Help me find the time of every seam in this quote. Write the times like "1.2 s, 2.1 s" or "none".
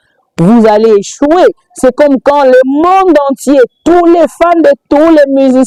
none